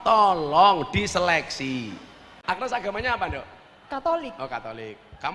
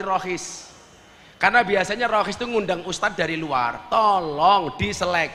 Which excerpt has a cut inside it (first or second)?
first